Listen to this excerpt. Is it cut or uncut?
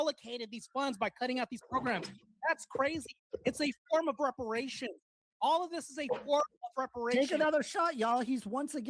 uncut